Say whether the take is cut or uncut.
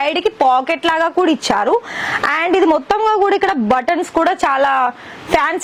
uncut